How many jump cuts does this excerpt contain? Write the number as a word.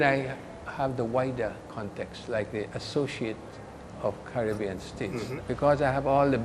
one